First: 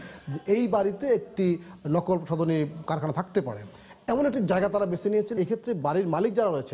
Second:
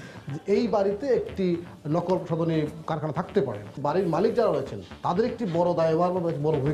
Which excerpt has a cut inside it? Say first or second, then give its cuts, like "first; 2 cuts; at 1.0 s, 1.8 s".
second; 1 cut; at 3.8 s